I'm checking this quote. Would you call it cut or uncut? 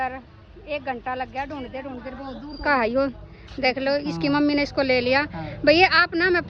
uncut